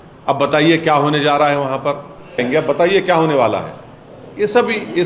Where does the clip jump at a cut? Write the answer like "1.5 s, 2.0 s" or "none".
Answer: 2.4 s

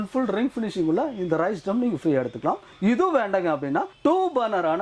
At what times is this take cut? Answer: none

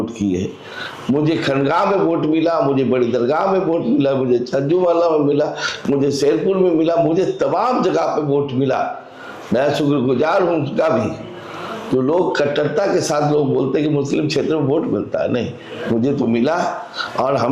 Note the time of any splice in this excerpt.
none

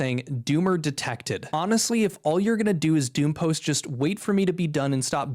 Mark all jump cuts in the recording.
1.1 s

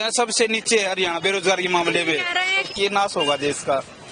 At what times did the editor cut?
2.7 s

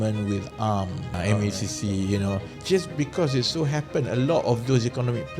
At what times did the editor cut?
1.2 s, 2.5 s

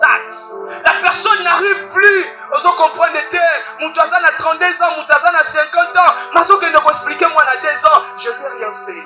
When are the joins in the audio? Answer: none

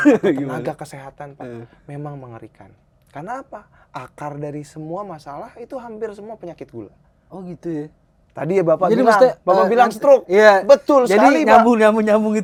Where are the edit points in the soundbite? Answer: none

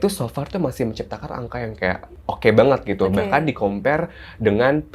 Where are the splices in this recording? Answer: 2.1 s

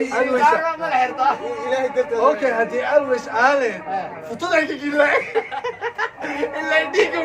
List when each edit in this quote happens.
5.3 s

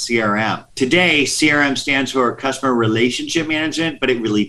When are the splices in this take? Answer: none

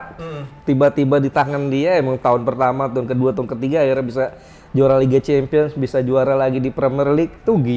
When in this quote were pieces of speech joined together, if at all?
none

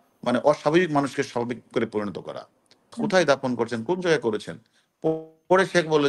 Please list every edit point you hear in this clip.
2.9 s

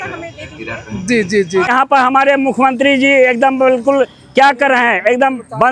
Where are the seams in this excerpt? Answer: 1.7 s

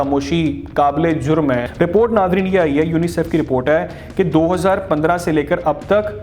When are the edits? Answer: 1.7 s

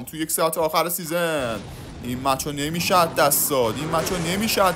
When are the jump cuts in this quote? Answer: none

